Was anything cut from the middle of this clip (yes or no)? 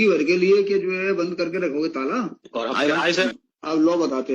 yes